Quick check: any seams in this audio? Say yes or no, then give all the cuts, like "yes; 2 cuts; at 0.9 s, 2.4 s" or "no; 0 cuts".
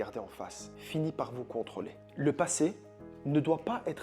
yes; 1 cut; at 2.0 s